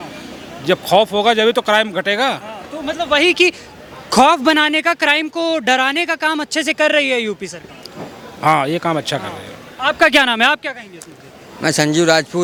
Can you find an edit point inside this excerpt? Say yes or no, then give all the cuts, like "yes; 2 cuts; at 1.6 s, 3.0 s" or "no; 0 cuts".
no; 0 cuts